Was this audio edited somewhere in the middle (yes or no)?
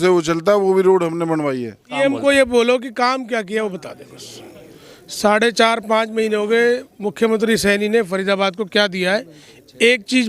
yes